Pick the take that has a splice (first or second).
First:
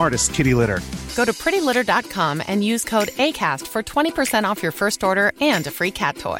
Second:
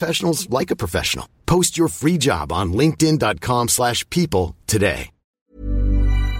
second